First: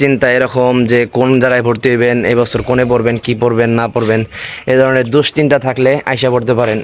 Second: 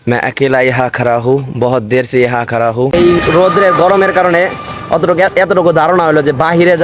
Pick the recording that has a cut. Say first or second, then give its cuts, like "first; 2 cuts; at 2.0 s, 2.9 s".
second; 1 cut; at 2.9 s